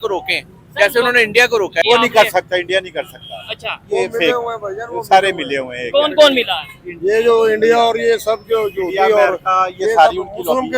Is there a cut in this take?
yes; 1 cut; at 1.8 s

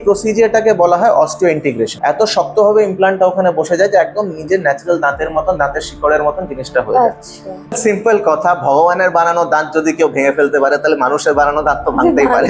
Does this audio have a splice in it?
yes; 2 cuts; at 1.9 s, 7.8 s

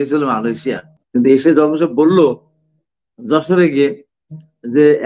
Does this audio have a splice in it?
yes; 1 cut; at 1.0 s

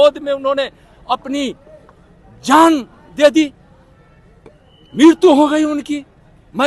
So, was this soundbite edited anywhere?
no; 0 cuts

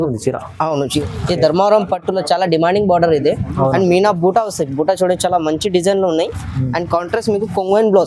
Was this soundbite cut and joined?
yes; 1 cut; at 1.0 s

